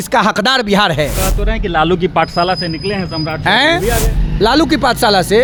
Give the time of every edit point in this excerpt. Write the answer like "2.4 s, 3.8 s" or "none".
none